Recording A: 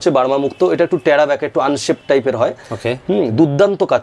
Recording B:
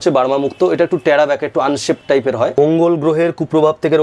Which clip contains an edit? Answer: B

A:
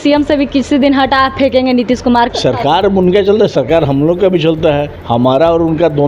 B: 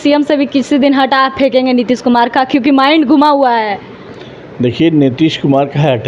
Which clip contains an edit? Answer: A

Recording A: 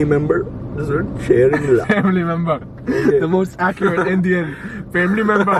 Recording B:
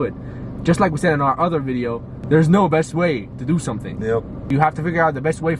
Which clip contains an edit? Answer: B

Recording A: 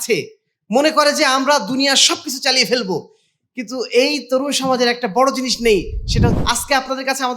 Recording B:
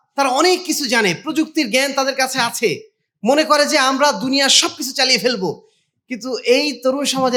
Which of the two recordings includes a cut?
A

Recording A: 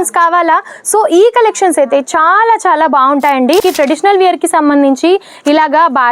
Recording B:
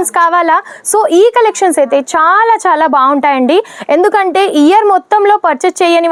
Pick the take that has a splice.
A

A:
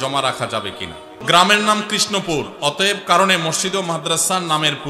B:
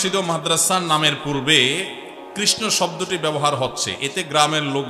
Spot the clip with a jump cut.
A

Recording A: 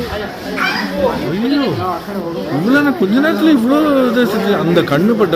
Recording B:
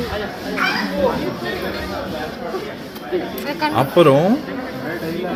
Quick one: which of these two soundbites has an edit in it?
A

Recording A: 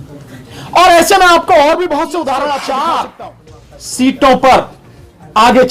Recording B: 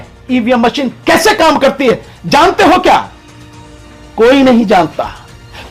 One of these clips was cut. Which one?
A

